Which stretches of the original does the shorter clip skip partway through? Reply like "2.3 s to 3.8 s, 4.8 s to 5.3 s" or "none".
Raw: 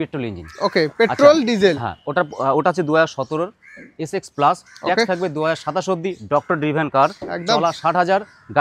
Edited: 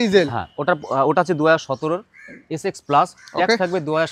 none